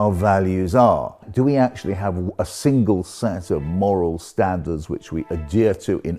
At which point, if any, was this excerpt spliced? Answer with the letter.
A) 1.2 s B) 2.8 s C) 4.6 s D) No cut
A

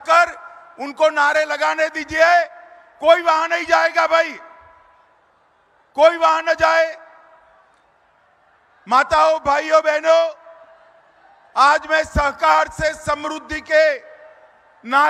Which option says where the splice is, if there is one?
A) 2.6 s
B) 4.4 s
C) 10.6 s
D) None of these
D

